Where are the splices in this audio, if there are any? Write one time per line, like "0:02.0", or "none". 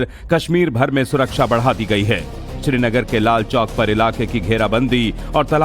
0:03.2